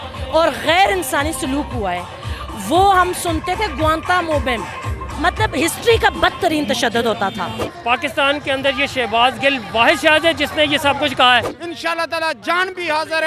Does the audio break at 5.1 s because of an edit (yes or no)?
yes